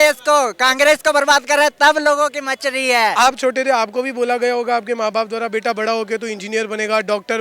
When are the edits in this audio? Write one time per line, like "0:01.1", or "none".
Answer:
0:03.1